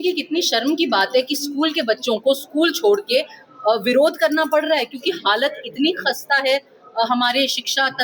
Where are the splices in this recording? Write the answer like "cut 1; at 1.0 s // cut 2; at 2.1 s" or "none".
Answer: none

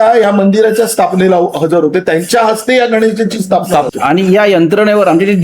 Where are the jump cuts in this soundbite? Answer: cut 1; at 3.9 s

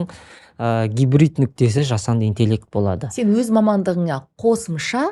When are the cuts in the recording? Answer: none

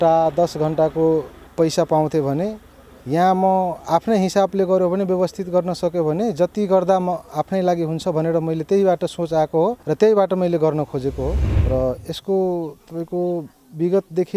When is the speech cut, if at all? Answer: cut 1; at 11.5 s

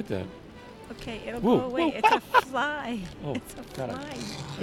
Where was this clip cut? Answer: none

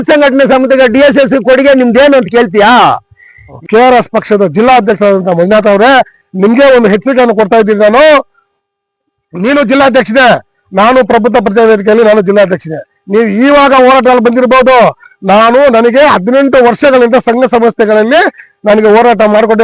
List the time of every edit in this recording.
cut 1; at 3.4 s

